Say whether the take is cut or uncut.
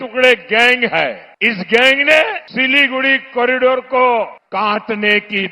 cut